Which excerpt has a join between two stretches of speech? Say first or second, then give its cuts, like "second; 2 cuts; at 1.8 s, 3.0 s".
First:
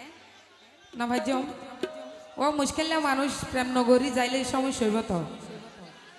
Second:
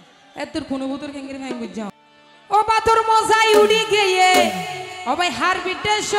second; 1 cut; at 1.9 s